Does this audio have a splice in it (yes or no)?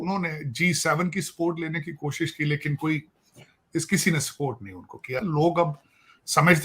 yes